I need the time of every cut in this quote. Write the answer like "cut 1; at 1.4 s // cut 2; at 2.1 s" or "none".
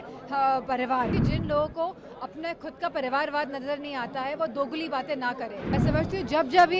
cut 1; at 1.3 s // cut 2; at 5.5 s